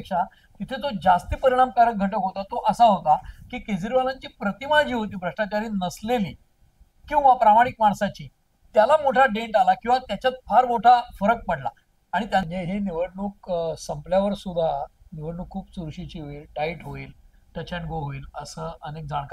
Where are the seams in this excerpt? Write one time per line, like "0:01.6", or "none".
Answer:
0:12.4